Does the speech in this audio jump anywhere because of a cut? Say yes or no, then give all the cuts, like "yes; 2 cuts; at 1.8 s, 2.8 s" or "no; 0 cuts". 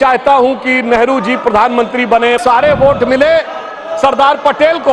yes; 1 cut; at 2.4 s